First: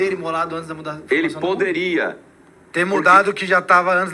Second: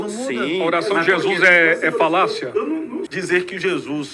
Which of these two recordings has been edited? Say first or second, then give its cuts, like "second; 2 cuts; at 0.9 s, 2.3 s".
second; 1 cut; at 3.1 s